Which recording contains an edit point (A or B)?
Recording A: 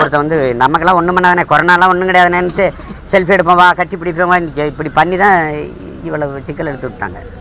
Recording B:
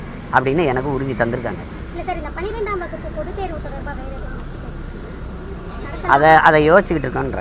B